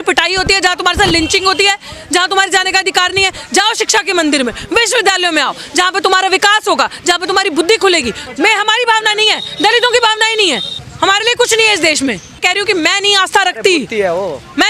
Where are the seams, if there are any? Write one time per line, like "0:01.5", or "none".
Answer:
0:08.2
0:10.8
0:12.4